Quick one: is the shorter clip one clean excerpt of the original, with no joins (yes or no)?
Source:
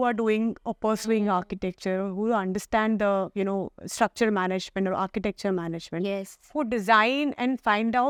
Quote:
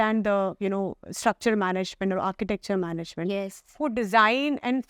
yes